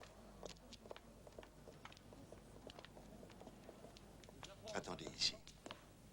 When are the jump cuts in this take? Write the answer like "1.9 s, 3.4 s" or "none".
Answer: 3.3 s